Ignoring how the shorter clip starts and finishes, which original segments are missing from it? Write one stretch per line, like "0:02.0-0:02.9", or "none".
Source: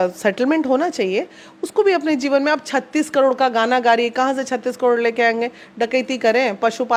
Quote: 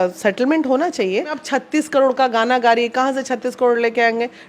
0:01.4-0:02.6